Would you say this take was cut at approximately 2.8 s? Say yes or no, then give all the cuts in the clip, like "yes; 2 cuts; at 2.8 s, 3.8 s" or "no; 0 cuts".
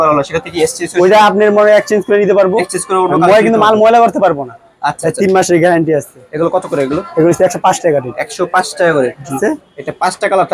no; 2 cuts; at 5.0 s, 9.4 s